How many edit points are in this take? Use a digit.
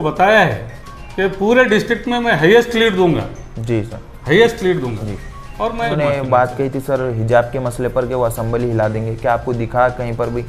1